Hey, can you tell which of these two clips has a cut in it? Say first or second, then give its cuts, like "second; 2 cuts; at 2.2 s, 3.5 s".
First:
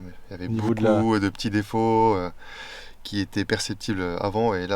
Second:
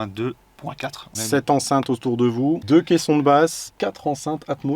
second; 3 cuts; at 1.1 s, 2.6 s, 3.7 s